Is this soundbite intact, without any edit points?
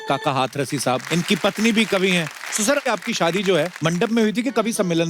no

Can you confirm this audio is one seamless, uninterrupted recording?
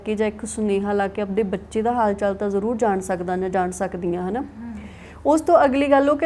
yes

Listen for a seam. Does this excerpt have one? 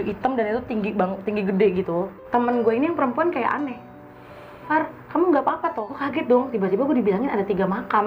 yes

